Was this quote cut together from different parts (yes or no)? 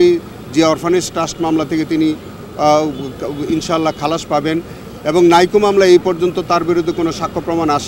no